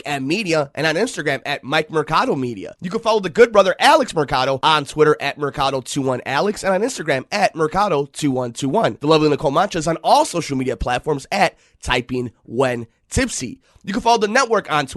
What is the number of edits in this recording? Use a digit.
0